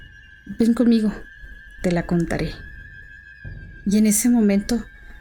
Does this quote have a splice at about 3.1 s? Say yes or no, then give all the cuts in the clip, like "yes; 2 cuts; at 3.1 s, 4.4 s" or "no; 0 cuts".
no; 0 cuts